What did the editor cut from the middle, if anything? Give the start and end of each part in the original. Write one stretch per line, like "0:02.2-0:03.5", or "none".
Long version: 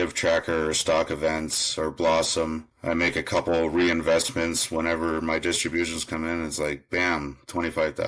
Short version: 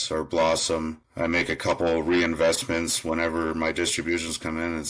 none